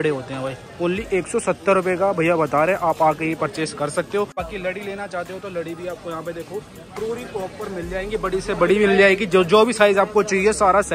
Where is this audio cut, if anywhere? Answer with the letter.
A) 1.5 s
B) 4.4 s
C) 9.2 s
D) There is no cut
B